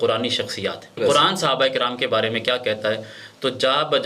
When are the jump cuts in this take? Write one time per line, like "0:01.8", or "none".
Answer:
0:01.0